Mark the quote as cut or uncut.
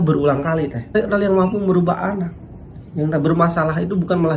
cut